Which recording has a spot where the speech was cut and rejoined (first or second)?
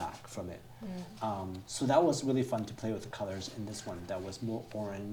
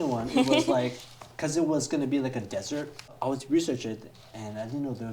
second